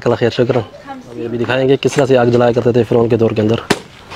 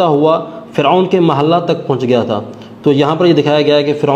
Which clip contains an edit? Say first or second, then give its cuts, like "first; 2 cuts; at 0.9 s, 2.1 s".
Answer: first; 1 cut; at 1.2 s